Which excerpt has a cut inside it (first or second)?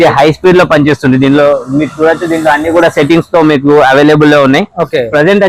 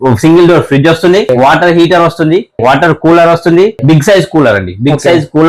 second